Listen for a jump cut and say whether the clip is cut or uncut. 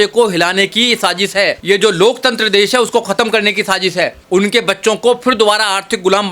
cut